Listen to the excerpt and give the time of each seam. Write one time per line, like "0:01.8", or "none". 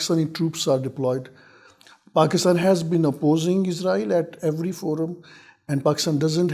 none